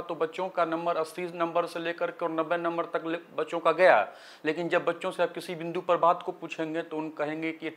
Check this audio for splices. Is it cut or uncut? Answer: uncut